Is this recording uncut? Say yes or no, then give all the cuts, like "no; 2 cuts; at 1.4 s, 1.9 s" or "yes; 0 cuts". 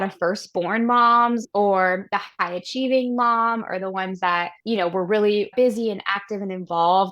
no; 1 cut; at 1.5 s